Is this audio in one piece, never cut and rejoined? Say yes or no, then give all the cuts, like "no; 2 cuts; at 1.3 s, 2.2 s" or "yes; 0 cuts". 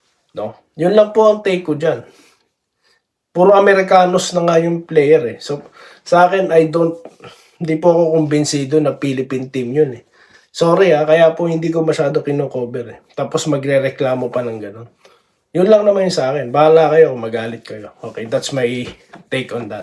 yes; 0 cuts